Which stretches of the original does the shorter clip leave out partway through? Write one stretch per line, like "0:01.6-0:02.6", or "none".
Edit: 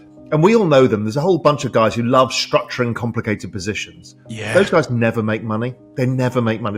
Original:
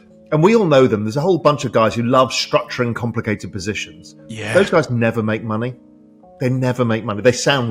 0:05.8-0:06.2